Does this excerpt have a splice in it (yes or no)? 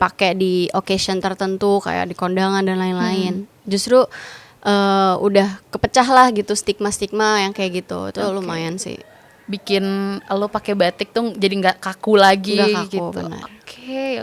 no